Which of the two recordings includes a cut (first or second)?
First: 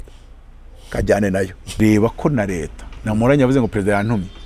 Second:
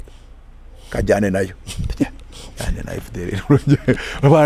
first